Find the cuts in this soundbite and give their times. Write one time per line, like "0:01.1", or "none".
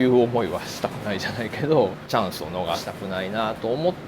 0:02.0
0:02.9